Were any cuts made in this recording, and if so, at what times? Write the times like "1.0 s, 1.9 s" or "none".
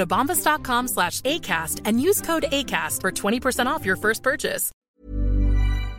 4.7 s